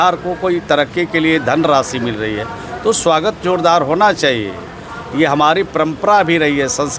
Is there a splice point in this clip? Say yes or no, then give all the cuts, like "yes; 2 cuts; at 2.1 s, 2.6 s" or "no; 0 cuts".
no; 0 cuts